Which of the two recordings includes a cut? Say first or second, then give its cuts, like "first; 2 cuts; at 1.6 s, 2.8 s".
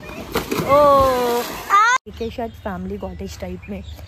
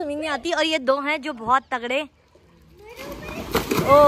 first; 1 cut; at 2.0 s